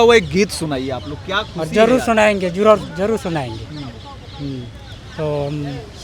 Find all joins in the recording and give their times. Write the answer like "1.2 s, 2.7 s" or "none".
none

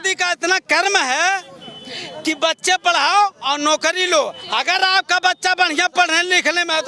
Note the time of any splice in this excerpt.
none

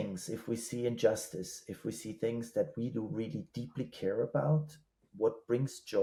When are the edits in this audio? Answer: none

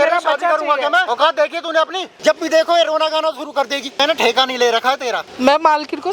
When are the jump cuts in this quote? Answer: 1.0 s, 2.0 s, 4.0 s, 5.3 s

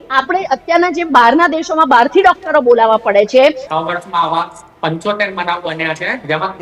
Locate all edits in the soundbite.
3.7 s

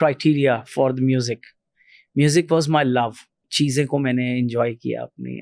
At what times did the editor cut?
3.5 s

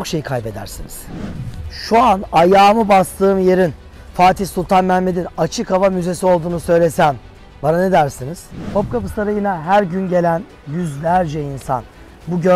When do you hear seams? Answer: 1.3 s, 8.7 s

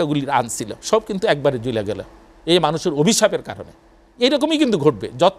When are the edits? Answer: none

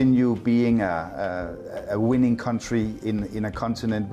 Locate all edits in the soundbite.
none

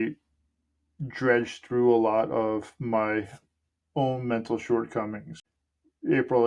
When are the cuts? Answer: 5.3 s

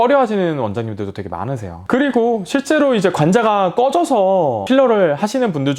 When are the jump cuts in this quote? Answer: none

